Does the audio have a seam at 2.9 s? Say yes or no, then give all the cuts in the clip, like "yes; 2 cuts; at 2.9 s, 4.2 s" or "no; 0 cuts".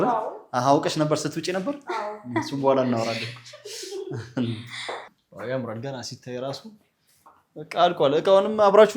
no; 1 cut; at 5.1 s